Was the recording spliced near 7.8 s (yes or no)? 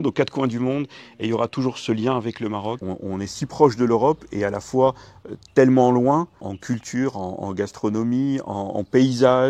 no